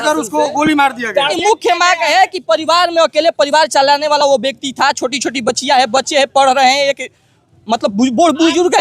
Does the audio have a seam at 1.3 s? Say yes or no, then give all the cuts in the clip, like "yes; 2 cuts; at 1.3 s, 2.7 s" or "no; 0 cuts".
yes; 1 cut; at 1.3 s